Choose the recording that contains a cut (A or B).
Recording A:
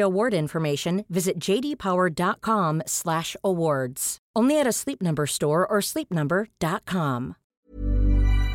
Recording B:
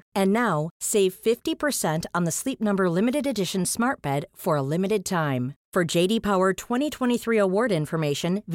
A